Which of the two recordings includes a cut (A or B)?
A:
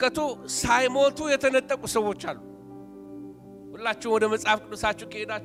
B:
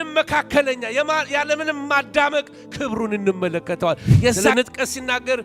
B